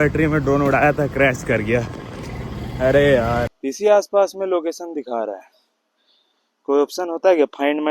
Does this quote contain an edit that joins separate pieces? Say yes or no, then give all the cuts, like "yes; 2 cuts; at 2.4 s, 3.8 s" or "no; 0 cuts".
yes; 1 cut; at 3.5 s